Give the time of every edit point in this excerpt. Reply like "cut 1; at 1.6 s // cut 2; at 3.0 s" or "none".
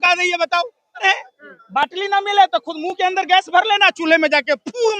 cut 1; at 1.0 s